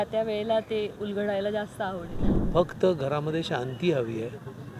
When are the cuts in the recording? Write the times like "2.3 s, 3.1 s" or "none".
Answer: 2.2 s